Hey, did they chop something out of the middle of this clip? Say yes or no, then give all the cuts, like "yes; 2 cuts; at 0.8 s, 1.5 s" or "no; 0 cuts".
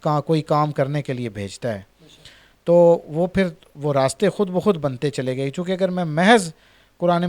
no; 0 cuts